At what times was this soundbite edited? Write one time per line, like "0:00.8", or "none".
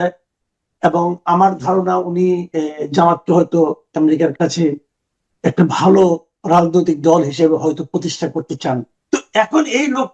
0:08.9